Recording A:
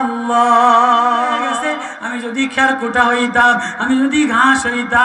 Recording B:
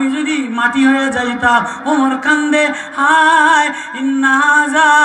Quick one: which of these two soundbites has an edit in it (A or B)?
A